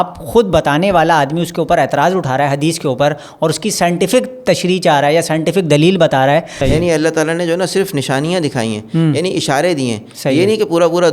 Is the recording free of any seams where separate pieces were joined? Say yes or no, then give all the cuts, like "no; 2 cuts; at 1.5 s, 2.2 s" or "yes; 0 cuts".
no; 1 cut; at 6.5 s